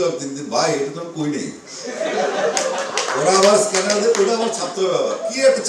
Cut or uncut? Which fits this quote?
uncut